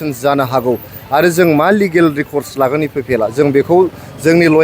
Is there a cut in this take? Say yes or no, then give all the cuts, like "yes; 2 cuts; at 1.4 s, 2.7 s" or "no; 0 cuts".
no; 0 cuts